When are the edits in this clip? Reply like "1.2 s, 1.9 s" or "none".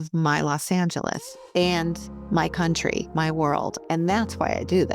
2.1 s, 3.8 s

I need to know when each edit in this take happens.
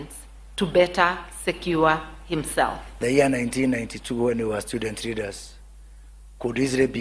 3.0 s

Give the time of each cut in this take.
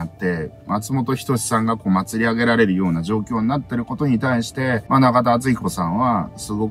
none

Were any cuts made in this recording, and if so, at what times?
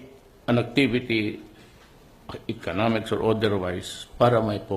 1.7 s

